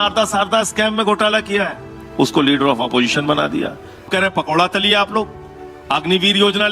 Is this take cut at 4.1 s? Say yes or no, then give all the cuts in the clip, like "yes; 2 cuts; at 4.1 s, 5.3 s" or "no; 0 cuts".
yes; 1 cut; at 4.1 s